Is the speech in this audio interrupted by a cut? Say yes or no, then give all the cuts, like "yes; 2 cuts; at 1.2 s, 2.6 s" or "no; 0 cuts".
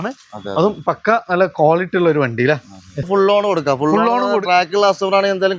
yes; 1 cut; at 3.0 s